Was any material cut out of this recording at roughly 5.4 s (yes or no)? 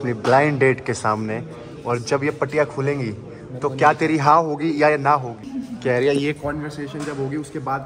yes